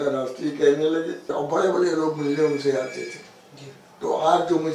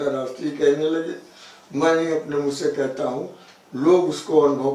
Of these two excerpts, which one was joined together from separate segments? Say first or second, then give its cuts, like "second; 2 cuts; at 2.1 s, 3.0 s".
first; 1 cut; at 1.3 s